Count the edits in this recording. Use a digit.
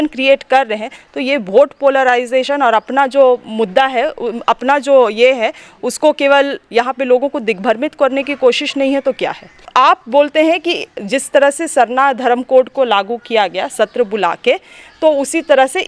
1